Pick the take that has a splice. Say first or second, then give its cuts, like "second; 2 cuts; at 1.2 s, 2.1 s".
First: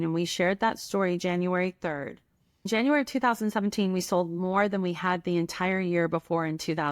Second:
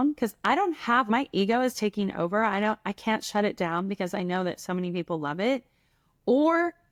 first; 1 cut; at 2.7 s